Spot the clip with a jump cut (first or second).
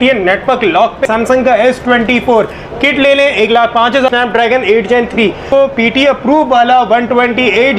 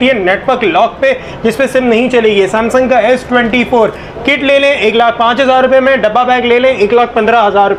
first